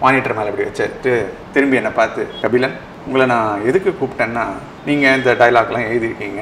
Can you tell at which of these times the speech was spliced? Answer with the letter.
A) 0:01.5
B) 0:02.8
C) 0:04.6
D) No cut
D